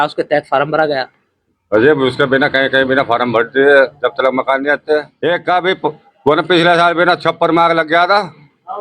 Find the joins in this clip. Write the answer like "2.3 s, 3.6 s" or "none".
5.1 s